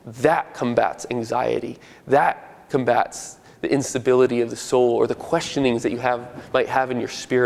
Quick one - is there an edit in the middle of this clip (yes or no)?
no